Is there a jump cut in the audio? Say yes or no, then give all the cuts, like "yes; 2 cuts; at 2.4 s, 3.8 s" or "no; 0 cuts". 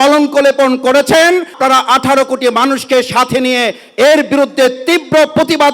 yes; 1 cut; at 1.5 s